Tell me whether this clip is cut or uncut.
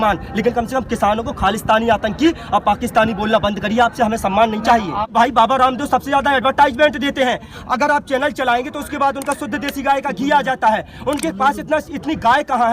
cut